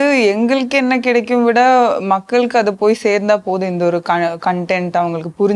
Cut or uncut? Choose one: uncut